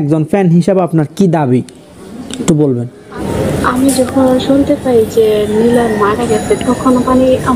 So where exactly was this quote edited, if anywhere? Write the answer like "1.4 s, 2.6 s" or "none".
3.3 s

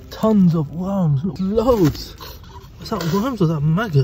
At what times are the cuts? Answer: 1.4 s

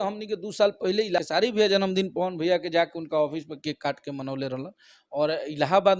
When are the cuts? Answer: 1.2 s

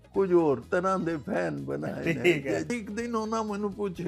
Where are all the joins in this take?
2.7 s

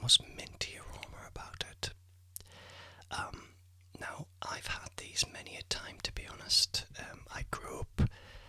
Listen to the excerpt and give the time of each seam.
none

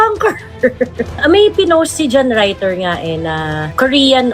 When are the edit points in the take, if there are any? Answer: 1.2 s

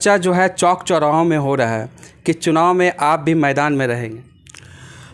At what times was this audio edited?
none

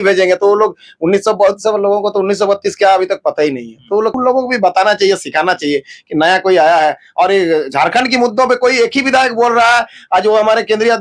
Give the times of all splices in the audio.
4.1 s

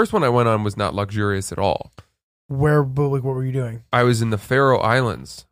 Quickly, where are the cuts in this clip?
none

